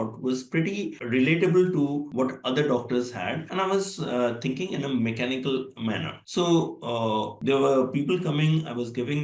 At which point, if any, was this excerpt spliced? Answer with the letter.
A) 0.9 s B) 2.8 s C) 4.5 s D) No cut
A